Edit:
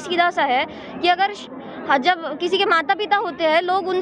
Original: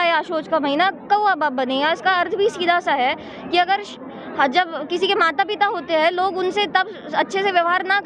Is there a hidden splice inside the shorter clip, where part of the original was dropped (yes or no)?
no